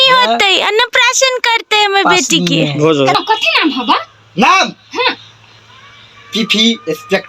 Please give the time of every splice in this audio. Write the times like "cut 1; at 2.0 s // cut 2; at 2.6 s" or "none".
cut 1; at 3.2 s